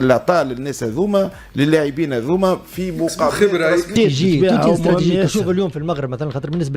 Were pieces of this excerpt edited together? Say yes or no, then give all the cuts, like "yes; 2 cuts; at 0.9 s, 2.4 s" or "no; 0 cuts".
yes; 1 cut; at 3.9 s